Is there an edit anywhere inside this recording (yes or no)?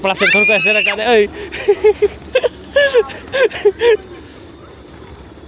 yes